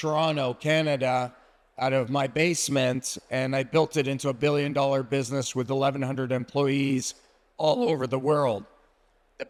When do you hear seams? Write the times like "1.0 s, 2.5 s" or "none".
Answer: none